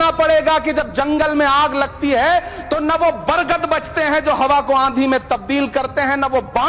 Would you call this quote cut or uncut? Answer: uncut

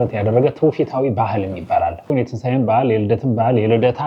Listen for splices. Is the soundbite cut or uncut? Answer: cut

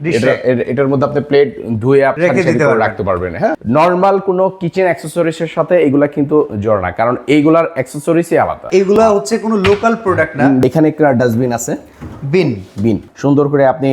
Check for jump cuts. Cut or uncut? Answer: cut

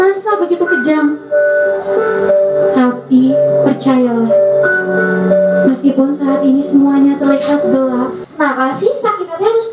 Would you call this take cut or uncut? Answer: cut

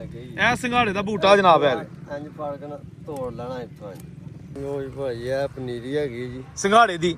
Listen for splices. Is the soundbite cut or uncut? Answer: cut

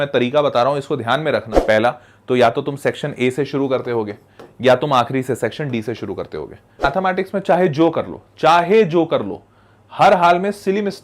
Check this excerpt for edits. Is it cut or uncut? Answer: cut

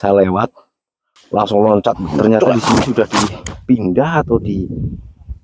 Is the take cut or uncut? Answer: cut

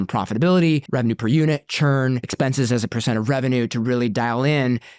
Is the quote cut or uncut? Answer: cut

